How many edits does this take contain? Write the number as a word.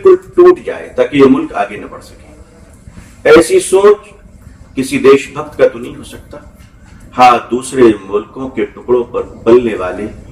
zero